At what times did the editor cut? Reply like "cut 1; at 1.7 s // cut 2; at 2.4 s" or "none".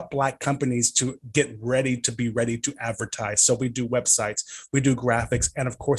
none